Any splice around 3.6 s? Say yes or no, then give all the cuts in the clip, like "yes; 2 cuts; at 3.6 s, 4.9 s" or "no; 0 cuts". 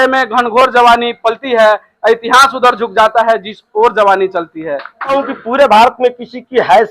no; 1 cut; at 5.1 s